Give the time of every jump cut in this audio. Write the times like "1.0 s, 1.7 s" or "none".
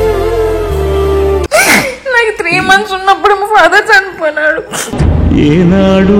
1.5 s